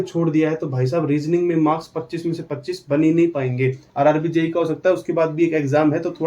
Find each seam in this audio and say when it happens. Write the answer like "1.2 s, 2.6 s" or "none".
3.8 s

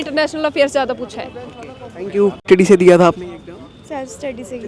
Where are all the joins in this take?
2.4 s

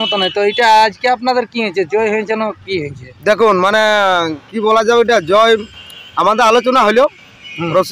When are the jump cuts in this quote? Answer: none

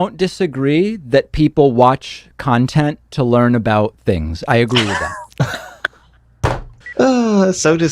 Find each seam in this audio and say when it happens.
6.8 s

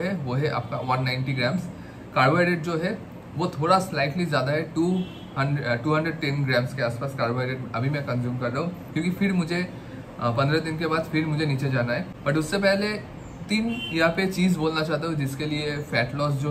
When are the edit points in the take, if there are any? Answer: 12.1 s

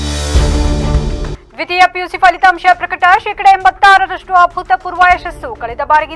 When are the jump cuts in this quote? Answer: 1.4 s

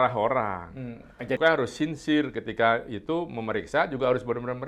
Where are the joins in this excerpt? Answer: 1.4 s

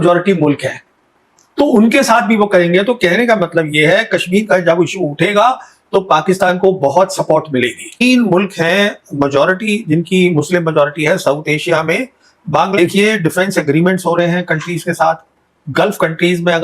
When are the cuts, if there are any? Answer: 8.0 s, 12.7 s

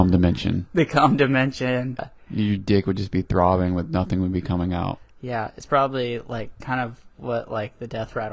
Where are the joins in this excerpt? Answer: 2.0 s

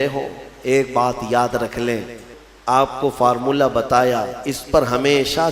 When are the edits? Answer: 2.3 s

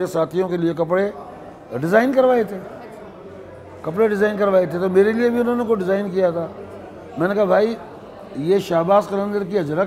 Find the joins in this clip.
none

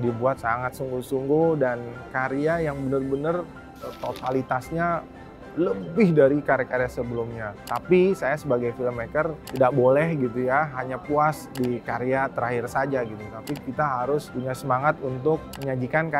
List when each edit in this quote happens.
none

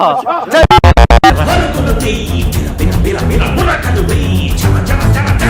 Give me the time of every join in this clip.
none

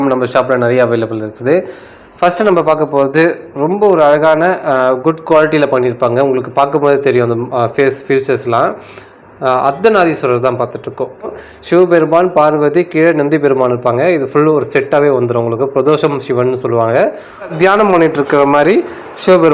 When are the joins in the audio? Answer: 11.3 s, 17.5 s

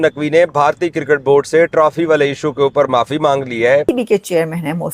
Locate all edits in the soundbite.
3.9 s

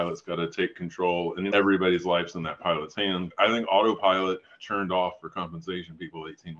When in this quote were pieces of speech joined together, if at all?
3.3 s

